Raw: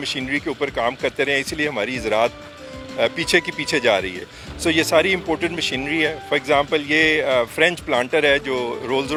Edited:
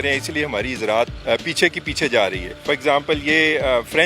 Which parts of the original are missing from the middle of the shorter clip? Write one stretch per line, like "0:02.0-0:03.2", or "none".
0:02.4-0:02.9
0:04.3-0:06.2